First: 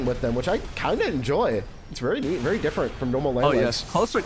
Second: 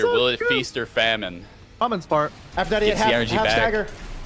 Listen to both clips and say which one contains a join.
second; 1 cut; at 1.8 s

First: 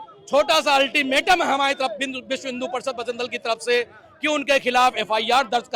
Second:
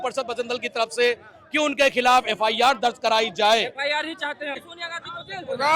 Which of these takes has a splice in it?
second; 1 cut; at 4.6 s

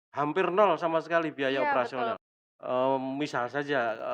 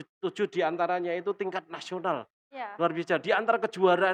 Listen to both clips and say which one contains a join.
first; 1 cut; at 2.2 s

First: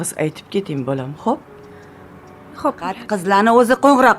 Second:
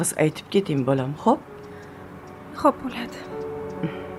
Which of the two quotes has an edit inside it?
first; 1 cut; at 3.1 s

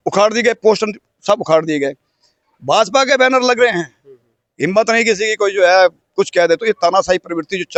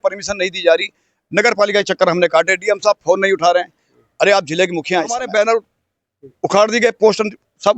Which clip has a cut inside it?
second; 1 cut; at 5.2 s

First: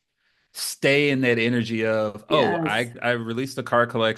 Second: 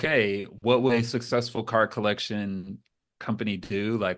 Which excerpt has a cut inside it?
first; 1 cut; at 3.0 s

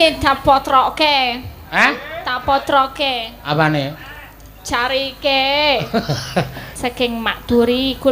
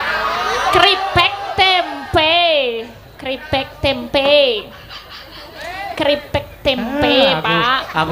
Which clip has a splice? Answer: first; 1 cut; at 6.6 s

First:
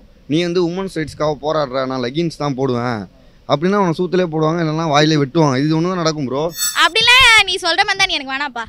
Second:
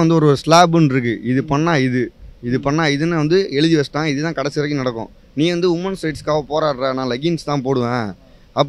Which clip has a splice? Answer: first; 1 cut; at 6.6 s

